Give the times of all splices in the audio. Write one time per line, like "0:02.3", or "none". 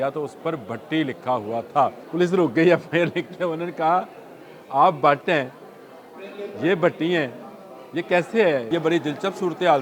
0:02.0
0:08.7